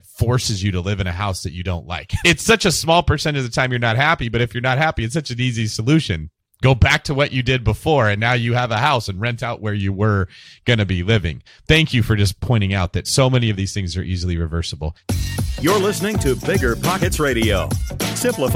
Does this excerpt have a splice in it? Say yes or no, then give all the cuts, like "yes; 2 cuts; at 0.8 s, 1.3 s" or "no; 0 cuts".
yes; 4 cuts; at 2.1 s, 11.5 s, 13.0 s, 15.0 s